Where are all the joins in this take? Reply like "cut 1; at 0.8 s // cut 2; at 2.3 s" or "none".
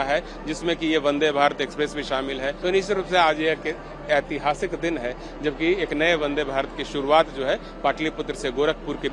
cut 1; at 2.6 s